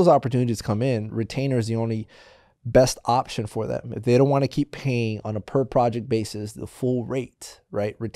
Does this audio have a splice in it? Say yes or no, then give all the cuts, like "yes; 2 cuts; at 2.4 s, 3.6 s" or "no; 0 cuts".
no; 0 cuts